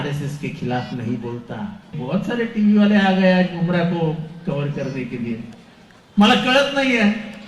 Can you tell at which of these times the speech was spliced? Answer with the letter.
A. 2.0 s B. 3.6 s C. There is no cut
A